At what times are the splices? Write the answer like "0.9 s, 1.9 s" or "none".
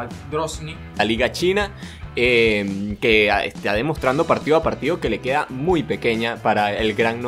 1.0 s